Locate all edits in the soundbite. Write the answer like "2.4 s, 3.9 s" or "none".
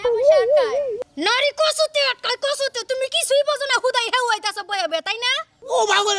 1.1 s